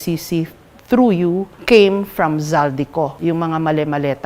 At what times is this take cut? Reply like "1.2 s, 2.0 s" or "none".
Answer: 1.5 s, 3.1 s